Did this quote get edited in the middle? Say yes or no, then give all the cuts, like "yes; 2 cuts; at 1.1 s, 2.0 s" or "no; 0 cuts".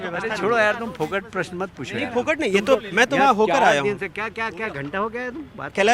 no; 0 cuts